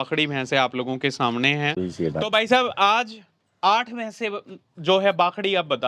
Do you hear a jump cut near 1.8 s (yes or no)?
yes